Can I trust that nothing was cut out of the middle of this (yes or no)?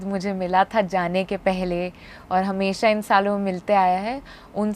yes